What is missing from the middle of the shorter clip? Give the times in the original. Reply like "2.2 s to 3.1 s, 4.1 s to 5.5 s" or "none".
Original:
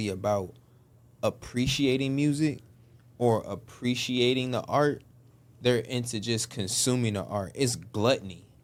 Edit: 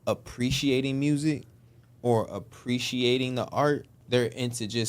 5.1 s to 5.5 s